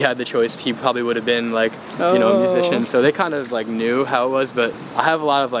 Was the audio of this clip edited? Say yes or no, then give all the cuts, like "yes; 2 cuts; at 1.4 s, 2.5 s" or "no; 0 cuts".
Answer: no; 0 cuts